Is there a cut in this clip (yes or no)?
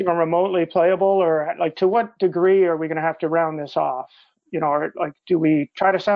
no